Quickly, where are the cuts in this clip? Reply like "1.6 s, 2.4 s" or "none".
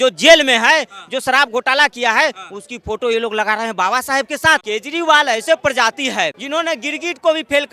4.6 s, 6.4 s